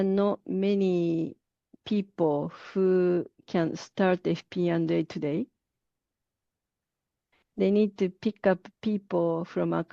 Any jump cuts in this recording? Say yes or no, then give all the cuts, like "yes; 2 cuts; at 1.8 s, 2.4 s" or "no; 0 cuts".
no; 0 cuts